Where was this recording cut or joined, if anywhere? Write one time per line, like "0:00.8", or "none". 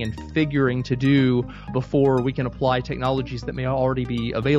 0:01.7